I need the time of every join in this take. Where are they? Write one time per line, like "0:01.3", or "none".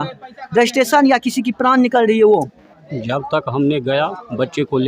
none